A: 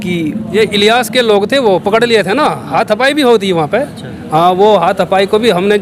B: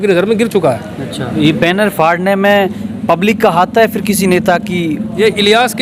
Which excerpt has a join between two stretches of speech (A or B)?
B